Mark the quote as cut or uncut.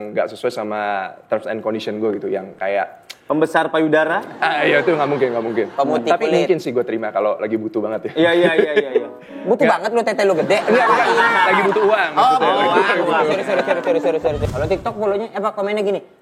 cut